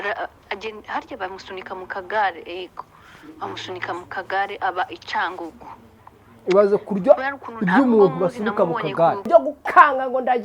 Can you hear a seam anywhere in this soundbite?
yes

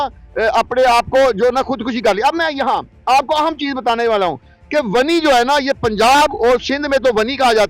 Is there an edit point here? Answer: no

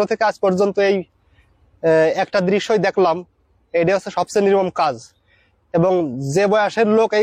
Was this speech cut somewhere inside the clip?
no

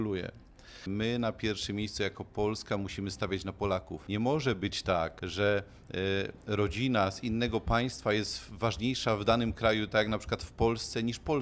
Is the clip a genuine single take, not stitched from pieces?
no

